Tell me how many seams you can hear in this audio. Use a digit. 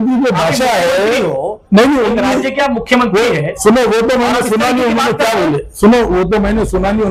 0